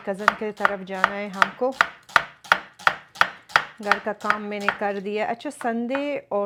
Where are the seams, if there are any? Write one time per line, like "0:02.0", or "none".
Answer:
none